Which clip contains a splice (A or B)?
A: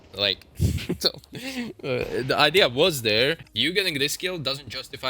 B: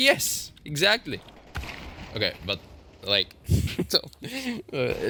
A